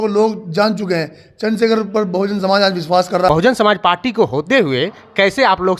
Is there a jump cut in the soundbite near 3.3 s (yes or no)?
yes